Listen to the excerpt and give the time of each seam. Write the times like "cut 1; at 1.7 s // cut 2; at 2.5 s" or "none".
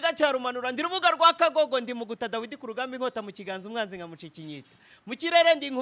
none